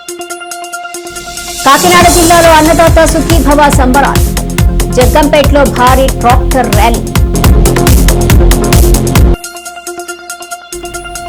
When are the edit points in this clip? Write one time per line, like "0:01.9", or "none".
none